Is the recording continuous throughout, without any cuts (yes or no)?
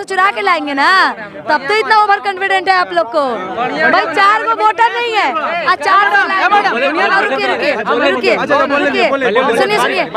yes